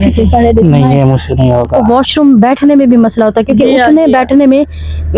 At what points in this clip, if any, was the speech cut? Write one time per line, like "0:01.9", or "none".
0:01.7